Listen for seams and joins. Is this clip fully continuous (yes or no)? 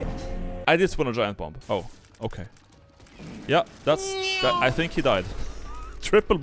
no